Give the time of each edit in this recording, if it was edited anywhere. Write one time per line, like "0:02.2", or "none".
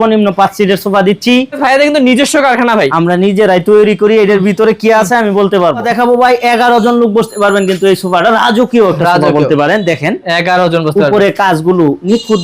0:01.6
0:05.9

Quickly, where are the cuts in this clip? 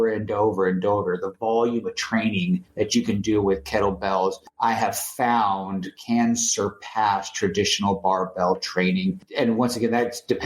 0:02.7
0:04.5
0:09.2

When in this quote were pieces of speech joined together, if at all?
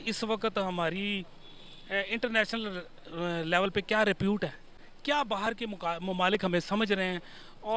none

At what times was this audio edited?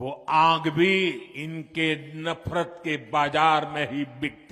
0:01.3

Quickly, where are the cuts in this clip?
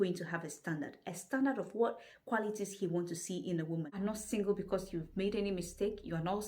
0:03.9

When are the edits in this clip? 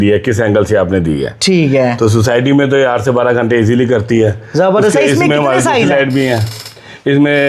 none

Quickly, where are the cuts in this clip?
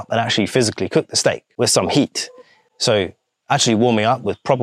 0:01.5

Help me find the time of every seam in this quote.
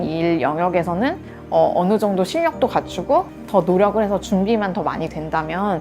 none

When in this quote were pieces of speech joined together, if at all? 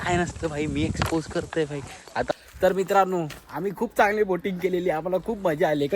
0:02.3

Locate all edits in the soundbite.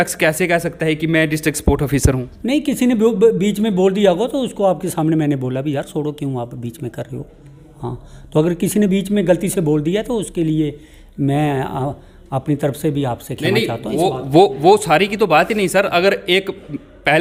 none

